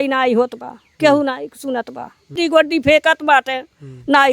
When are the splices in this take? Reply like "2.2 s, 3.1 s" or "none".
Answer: 2.4 s